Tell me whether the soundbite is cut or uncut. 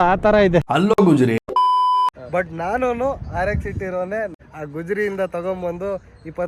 cut